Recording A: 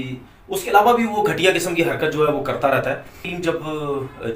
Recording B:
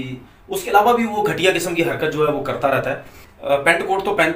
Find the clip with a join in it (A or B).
A